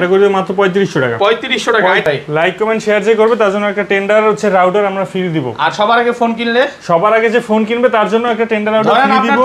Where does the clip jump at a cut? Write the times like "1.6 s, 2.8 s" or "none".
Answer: 2.0 s